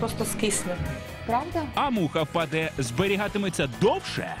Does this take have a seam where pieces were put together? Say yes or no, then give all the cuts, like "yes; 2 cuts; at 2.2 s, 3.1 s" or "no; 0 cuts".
no; 0 cuts